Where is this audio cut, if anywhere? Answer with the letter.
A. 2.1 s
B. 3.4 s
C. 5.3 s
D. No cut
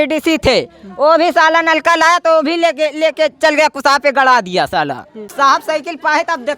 C